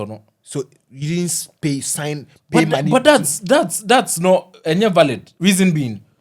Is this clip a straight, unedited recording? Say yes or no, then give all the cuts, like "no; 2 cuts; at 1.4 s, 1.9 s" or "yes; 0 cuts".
no; 1 cut; at 5.3 s